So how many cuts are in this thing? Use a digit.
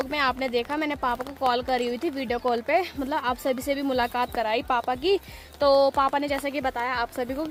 0